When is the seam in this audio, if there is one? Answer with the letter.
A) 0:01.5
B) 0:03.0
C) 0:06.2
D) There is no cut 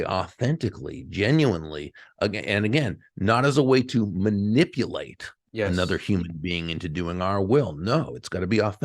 D